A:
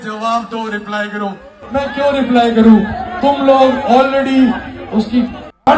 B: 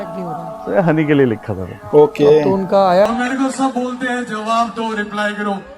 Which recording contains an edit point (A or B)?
B